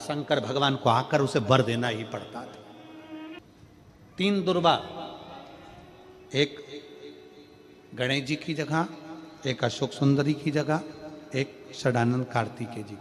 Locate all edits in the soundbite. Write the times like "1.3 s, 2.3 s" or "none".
3.4 s